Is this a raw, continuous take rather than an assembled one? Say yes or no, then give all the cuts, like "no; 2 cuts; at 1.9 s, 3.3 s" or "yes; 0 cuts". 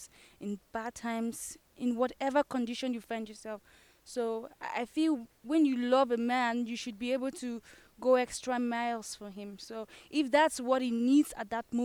yes; 0 cuts